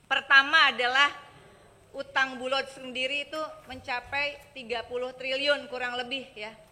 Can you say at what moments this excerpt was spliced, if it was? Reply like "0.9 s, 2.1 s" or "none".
none